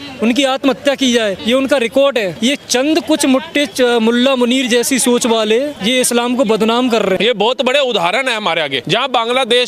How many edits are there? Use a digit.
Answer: 5